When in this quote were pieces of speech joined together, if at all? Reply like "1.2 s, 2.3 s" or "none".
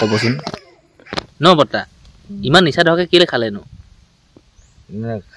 1.2 s